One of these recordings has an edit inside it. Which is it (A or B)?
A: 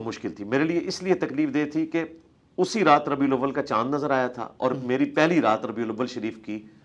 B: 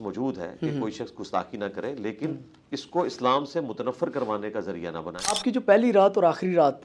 B